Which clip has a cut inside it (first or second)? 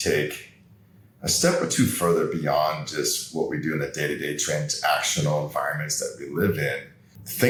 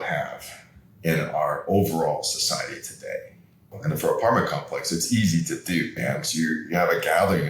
second